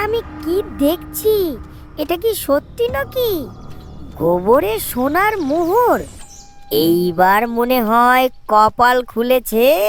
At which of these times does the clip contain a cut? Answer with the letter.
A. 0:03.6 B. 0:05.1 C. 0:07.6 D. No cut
D